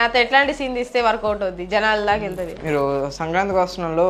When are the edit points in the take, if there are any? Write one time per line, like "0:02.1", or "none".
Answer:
0:02.6

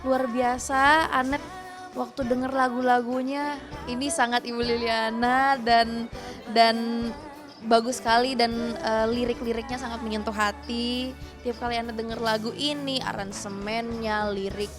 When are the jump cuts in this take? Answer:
none

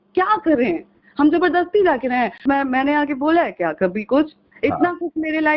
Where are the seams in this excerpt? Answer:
0:02.4

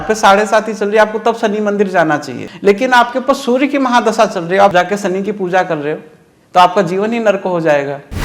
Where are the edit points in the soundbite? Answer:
0:02.5
0:04.7

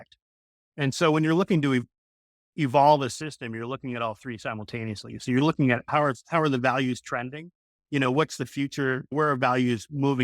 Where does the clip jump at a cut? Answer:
0:02.0
0:05.9
0:09.1

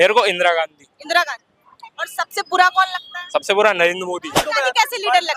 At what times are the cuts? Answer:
0:04.4

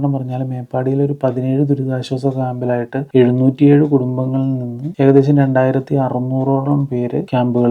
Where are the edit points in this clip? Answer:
none

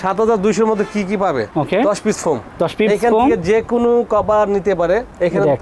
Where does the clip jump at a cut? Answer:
none

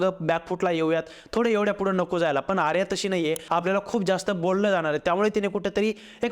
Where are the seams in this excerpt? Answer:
0:03.4

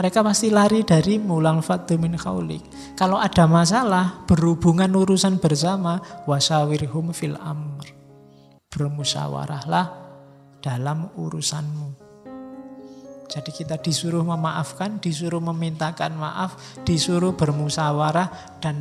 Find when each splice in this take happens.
none

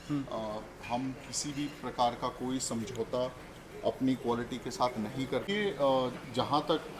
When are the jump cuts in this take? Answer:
0:05.5

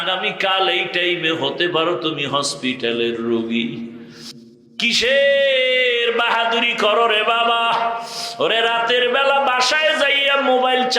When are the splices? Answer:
0:04.4

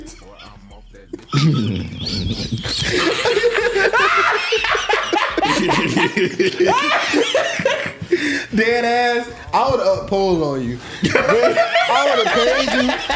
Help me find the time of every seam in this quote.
none

